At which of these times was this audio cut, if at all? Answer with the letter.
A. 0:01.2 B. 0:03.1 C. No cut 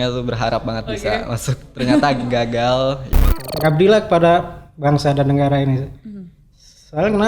B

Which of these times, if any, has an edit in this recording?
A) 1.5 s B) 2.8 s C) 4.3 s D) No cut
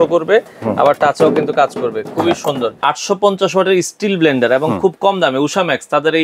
B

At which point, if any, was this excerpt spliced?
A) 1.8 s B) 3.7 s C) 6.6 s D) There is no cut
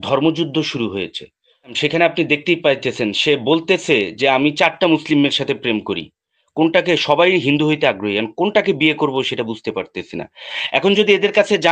A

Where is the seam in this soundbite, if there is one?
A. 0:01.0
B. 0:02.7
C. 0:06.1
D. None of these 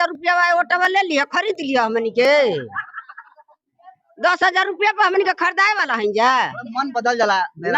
D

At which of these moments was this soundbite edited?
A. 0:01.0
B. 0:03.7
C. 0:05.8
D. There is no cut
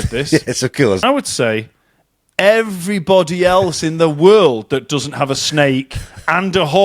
A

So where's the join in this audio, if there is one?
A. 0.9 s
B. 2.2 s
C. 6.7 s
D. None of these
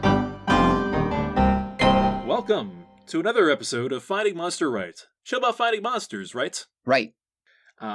B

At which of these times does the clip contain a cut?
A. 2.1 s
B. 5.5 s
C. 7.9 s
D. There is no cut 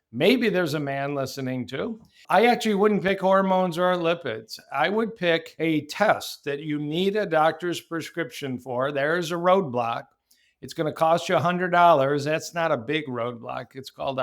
B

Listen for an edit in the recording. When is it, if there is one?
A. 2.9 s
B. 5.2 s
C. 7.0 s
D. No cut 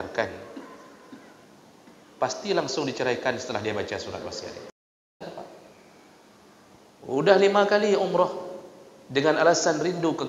B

